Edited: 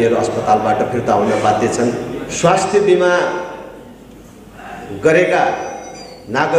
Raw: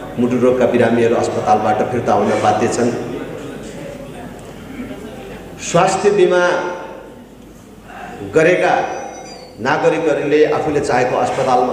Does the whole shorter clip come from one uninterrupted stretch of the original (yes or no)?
no